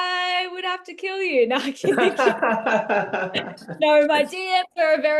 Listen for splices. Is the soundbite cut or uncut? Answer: uncut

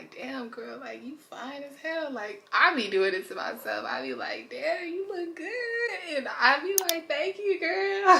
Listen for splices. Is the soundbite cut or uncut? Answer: uncut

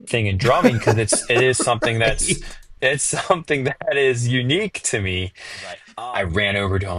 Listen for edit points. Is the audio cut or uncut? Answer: cut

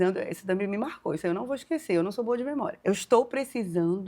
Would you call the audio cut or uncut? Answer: cut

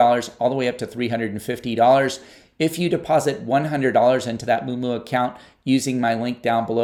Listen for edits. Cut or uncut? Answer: uncut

